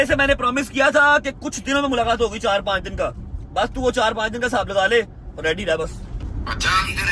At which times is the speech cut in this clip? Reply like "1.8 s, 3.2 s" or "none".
none